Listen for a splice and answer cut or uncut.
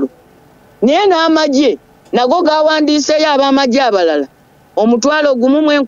uncut